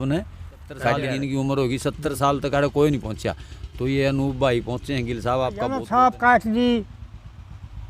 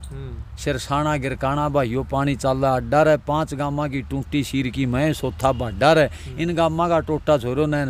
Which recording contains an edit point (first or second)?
first